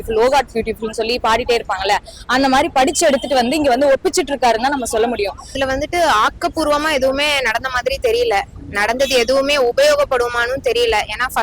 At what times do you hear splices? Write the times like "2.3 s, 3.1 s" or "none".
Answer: 5.4 s